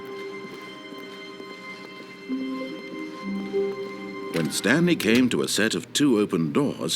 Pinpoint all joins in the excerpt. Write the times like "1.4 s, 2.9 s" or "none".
4.2 s